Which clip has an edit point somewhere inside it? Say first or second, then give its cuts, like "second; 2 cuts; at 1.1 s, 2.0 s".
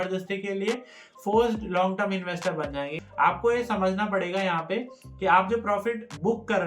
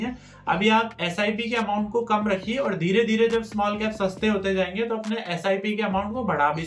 first; 1 cut; at 2.9 s